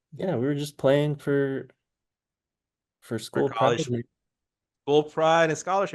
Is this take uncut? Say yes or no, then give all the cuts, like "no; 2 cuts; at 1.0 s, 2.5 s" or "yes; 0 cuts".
yes; 0 cuts